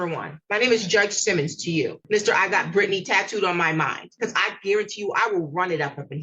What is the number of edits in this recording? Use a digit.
2